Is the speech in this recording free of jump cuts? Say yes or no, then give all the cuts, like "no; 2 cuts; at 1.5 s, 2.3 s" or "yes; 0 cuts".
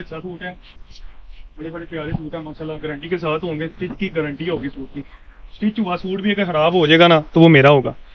yes; 0 cuts